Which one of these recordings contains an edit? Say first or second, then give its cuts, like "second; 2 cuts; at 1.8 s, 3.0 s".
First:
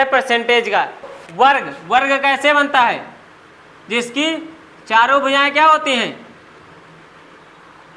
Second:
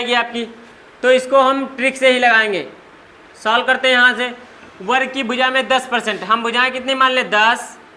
first; 1 cut; at 1.1 s